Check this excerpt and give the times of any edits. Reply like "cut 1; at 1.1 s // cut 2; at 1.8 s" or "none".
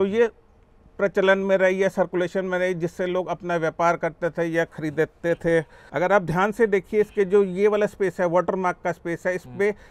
cut 1; at 5.8 s